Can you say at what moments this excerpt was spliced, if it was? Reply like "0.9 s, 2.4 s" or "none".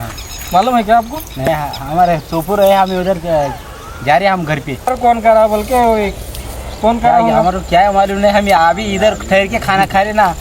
1.4 s, 4.9 s